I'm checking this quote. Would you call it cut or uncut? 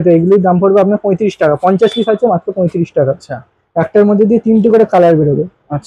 cut